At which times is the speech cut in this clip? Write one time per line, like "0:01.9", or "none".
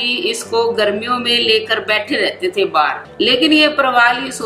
0:03.0